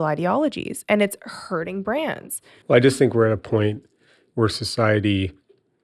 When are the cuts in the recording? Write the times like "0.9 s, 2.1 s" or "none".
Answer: none